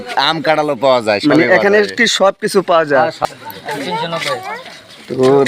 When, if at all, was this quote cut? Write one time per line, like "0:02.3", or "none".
0:03.1